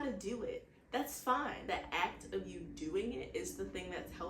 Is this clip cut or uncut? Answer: cut